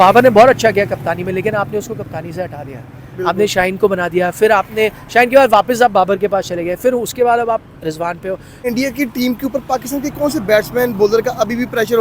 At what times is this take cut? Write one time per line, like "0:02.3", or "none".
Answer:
0:08.5